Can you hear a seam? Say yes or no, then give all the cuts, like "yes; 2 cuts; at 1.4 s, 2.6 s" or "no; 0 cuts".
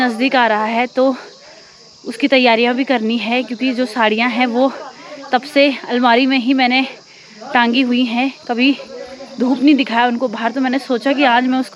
no; 0 cuts